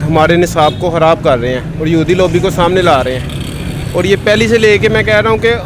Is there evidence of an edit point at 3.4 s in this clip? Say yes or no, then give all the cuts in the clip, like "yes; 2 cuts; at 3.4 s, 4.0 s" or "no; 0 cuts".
no; 0 cuts